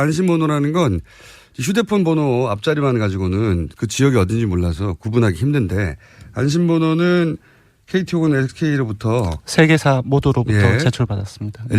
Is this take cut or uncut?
cut